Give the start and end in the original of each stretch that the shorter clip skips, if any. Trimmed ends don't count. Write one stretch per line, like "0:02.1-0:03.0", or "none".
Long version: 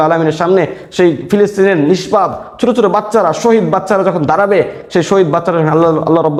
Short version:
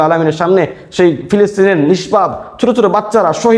none